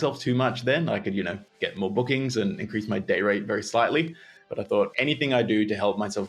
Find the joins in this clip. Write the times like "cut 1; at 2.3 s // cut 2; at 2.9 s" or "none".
cut 1; at 4.7 s